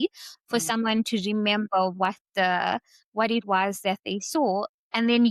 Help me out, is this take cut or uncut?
uncut